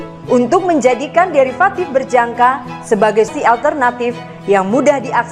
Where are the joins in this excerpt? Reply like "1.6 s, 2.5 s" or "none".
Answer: 3.3 s